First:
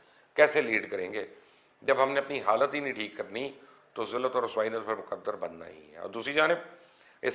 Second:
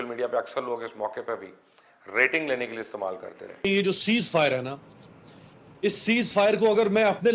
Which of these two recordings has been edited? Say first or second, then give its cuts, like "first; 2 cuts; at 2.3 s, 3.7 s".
second; 1 cut; at 3.6 s